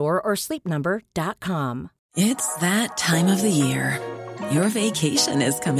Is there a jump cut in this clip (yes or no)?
yes